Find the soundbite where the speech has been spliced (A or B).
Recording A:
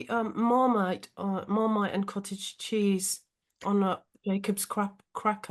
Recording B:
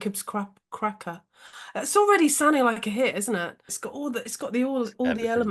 B